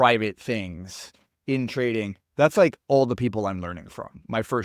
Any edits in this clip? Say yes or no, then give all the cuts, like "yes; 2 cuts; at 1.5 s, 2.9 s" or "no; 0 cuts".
no; 0 cuts